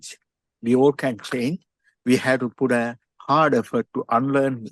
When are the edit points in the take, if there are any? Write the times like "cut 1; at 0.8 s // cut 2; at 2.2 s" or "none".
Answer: cut 1; at 3.1 s